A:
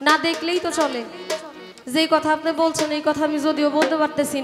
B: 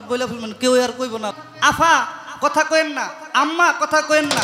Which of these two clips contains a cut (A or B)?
B